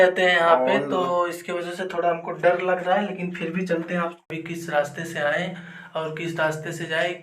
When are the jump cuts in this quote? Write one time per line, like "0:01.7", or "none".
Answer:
0:04.2